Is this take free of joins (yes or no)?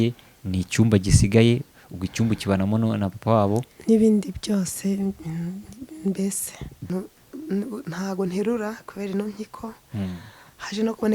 no